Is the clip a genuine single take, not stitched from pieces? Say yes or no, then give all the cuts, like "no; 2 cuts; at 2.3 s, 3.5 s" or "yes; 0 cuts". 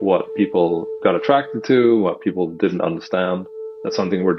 yes; 0 cuts